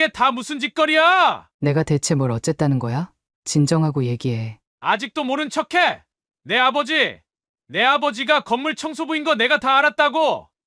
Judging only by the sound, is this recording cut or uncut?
cut